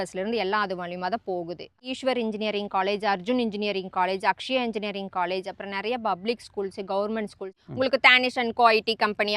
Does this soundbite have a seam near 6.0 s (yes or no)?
no